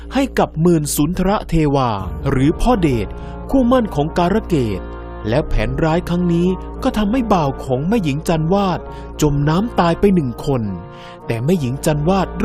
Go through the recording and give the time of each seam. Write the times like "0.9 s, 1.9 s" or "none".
none